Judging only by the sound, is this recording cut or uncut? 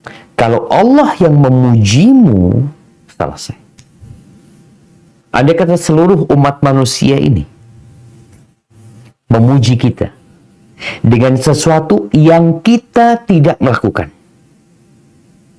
cut